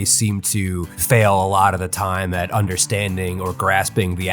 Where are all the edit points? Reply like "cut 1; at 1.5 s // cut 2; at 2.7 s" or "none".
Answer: cut 1; at 0.9 s